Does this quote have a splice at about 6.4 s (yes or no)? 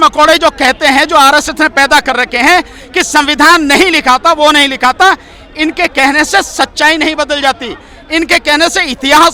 no